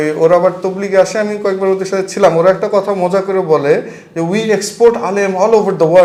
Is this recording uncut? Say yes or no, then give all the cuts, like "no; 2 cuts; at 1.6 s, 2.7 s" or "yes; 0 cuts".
yes; 0 cuts